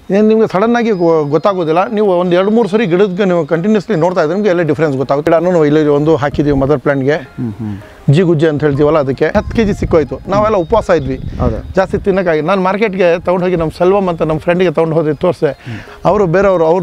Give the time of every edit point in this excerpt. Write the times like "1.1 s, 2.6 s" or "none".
5.3 s, 9.3 s

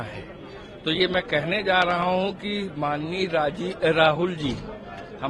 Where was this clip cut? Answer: none

